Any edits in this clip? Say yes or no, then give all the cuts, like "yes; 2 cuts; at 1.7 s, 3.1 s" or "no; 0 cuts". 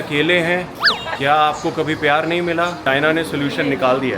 yes; 2 cuts; at 1.1 s, 2.8 s